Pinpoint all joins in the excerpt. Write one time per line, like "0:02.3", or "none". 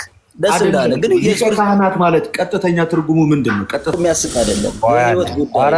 0:03.9